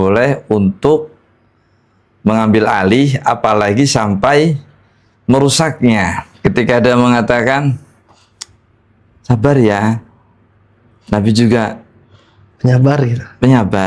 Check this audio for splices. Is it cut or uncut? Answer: cut